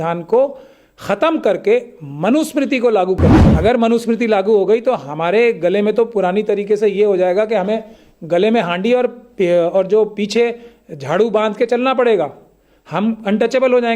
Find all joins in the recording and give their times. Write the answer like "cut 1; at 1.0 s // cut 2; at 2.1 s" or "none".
cut 1; at 3.4 s